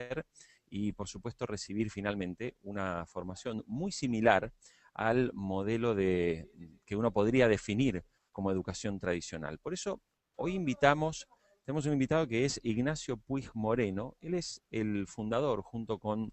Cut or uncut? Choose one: cut